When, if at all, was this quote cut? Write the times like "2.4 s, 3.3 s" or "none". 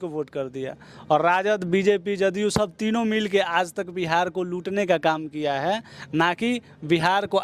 none